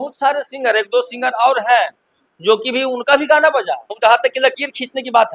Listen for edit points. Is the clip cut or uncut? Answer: cut